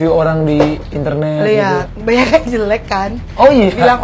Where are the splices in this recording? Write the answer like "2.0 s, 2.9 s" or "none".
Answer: 1.9 s